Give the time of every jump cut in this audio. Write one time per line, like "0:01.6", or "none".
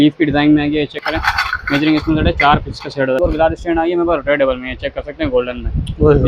0:01.0
0:03.2